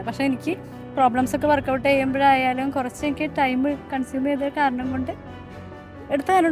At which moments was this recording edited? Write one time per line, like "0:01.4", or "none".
none